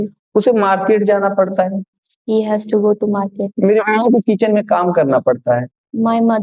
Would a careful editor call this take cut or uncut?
uncut